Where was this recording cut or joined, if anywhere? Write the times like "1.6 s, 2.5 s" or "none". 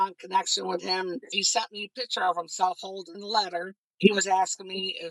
1.3 s, 3.8 s